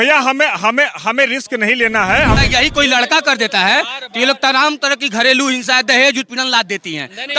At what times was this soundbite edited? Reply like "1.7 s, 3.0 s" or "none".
2.4 s